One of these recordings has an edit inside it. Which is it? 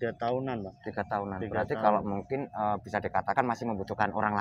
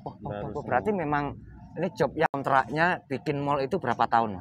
second; 1 cut; at 2.3 s

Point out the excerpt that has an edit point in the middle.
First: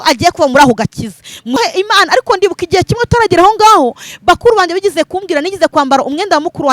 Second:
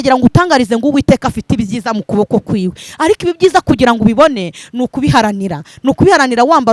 first; 1 cut; at 1.6 s

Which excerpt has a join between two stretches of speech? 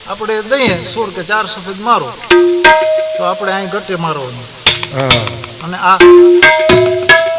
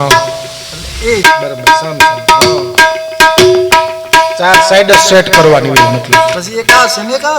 second; 1 cut; at 1.2 s

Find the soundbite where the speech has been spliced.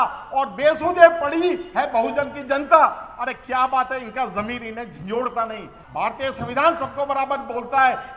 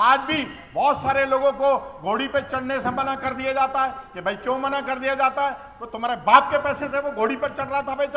first; 1 cut; at 5.8 s

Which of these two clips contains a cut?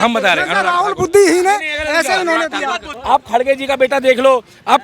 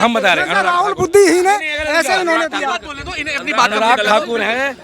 first; 1 cut; at 2.9 s

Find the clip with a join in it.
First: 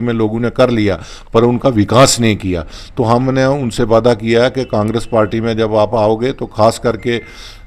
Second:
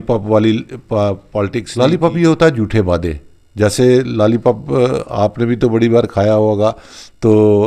second; 1 cut; at 1.6 s

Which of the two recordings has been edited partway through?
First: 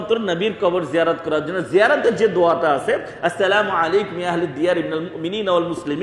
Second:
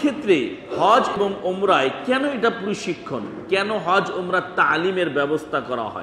second; 1 cut; at 1.2 s

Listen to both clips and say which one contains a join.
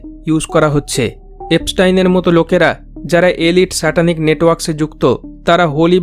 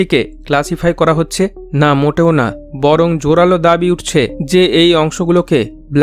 first; 1 cut; at 1.3 s

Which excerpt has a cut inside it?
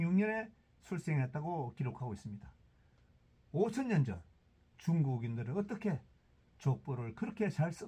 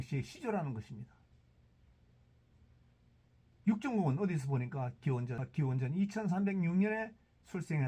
second; 1 cut; at 5.5 s

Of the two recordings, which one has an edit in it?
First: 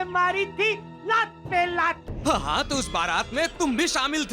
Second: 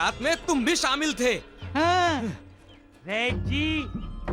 first; 1 cut; at 2.1 s

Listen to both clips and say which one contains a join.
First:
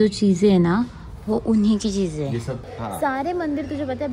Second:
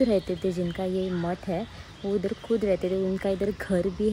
first; 1 cut; at 2.6 s

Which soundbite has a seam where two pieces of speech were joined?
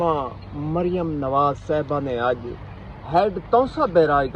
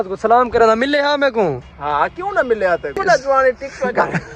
second; 1 cut; at 3.0 s

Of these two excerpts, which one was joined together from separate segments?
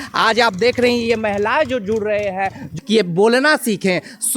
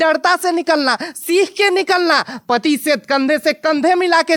first; 1 cut; at 2.7 s

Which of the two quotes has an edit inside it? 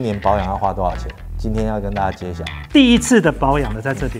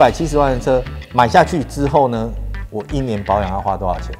first; 1 cut; at 2.5 s

